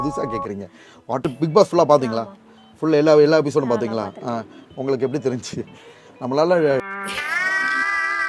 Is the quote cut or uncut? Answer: cut